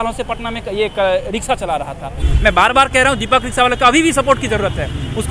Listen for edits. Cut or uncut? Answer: cut